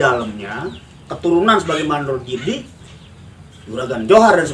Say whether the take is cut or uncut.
uncut